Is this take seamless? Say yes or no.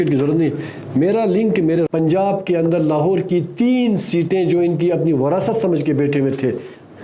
no